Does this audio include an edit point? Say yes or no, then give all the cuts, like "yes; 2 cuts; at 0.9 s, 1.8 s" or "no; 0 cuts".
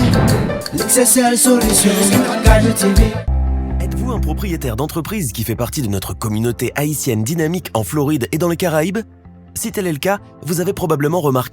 yes; 1 cut; at 3.3 s